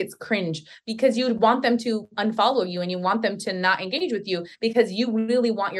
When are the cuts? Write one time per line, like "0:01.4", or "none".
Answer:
none